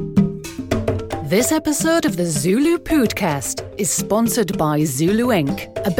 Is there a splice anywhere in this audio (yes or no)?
yes